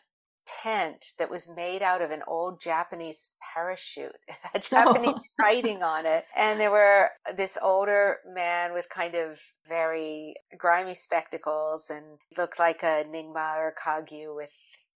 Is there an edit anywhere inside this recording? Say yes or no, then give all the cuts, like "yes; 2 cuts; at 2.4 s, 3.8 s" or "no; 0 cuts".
yes; 5 cuts; at 6.3 s, 7.2 s, 9.6 s, 10.4 s, 12.2 s